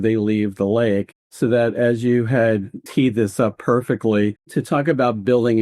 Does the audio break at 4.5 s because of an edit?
yes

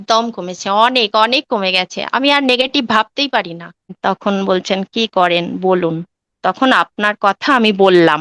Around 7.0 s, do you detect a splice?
no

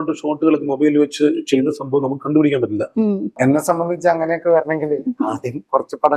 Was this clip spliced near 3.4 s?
yes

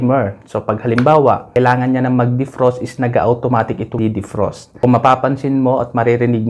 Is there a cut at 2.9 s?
no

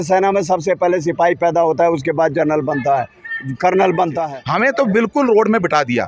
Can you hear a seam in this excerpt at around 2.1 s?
no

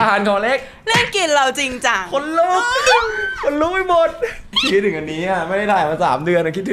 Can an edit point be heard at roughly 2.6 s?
no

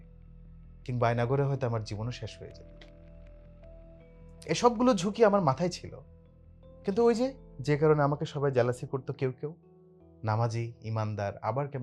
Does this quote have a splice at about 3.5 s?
no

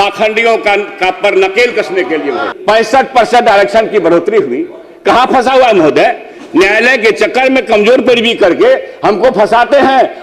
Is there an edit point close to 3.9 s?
no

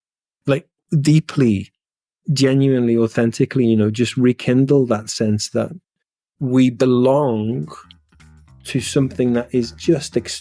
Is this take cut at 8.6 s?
no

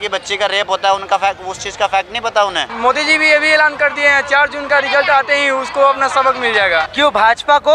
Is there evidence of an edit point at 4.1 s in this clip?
no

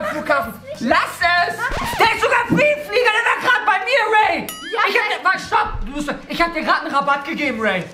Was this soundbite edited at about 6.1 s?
no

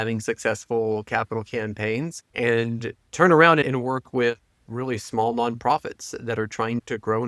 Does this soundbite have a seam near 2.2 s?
yes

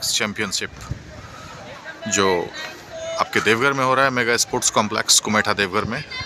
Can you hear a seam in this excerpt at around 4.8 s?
no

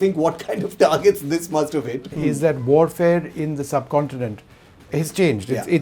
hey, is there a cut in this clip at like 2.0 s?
yes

